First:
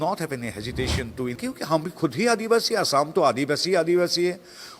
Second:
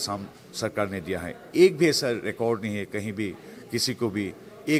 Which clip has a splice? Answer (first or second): first